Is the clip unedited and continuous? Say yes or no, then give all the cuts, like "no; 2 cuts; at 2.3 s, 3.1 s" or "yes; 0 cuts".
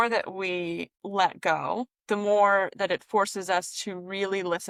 yes; 0 cuts